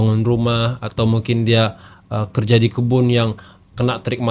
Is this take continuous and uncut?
yes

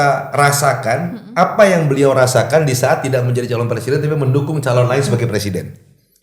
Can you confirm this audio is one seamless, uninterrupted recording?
yes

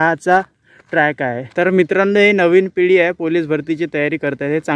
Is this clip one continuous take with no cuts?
no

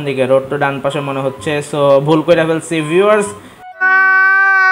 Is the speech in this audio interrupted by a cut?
no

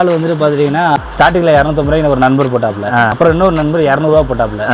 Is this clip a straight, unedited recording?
no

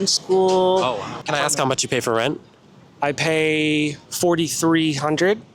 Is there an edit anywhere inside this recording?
yes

